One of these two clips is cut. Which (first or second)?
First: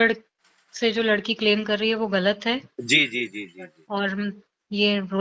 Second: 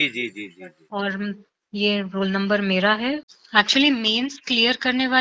second